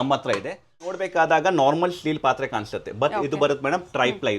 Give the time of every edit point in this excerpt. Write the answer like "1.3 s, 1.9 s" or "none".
0.9 s